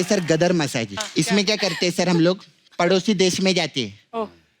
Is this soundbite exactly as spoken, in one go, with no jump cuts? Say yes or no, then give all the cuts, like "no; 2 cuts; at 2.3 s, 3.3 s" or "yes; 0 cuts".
no; 1 cut; at 1.0 s